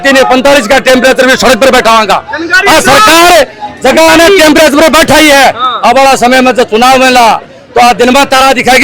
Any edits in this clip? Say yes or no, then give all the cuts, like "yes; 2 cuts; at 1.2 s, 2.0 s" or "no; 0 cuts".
no; 0 cuts